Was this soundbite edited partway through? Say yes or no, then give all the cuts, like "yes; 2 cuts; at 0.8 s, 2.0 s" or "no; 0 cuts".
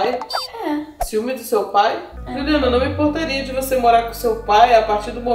no; 0 cuts